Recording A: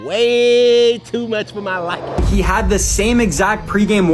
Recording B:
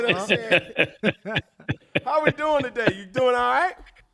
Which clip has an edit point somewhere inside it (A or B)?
A